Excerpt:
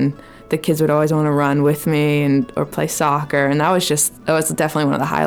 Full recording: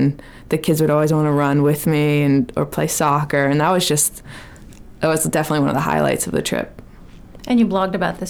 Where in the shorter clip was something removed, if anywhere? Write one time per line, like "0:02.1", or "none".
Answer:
0:04.1